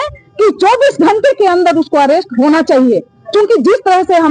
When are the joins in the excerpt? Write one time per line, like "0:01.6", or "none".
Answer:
none